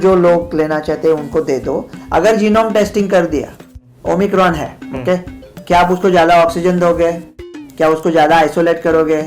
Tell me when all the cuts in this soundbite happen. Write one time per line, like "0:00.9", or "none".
0:01.9